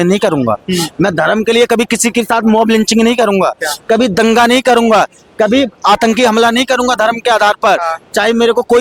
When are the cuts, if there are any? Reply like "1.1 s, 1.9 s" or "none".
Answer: none